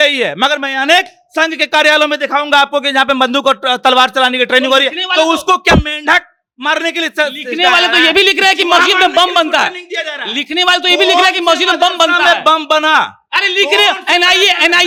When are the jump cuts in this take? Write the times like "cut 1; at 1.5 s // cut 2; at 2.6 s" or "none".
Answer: none